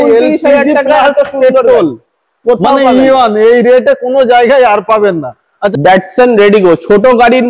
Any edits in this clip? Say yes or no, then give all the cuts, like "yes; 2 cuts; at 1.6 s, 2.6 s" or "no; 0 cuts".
no; 0 cuts